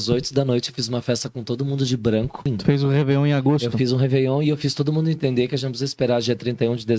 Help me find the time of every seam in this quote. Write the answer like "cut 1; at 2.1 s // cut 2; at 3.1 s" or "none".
cut 1; at 2.5 s

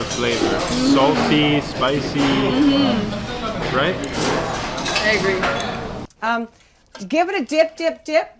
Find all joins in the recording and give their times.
cut 1; at 6.0 s

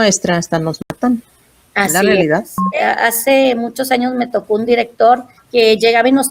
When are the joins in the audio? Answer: cut 1; at 2.6 s // cut 2; at 5.4 s

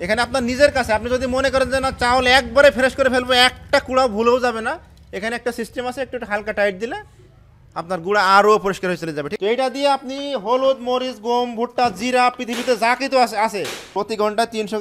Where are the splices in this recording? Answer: cut 1; at 9.3 s // cut 2; at 13.8 s

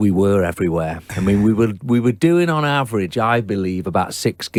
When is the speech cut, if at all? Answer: none

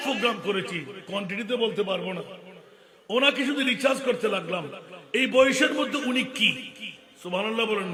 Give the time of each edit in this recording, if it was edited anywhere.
none

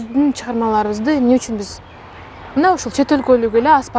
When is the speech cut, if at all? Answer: none

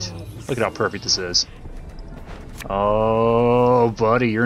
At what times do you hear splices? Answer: none

